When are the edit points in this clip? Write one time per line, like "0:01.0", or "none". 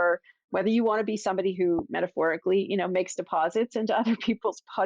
none